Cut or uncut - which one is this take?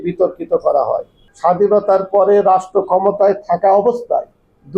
cut